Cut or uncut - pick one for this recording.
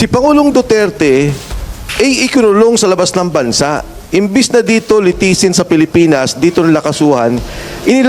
uncut